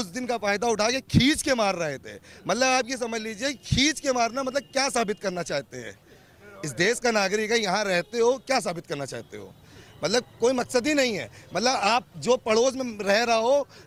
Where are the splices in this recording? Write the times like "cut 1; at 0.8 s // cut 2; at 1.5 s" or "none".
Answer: none